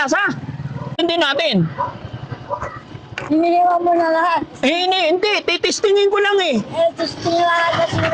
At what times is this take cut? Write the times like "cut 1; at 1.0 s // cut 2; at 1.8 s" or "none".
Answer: cut 1; at 1.0 s